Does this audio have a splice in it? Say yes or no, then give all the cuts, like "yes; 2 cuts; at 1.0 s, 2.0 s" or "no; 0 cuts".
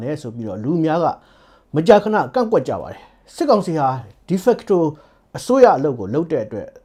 no; 0 cuts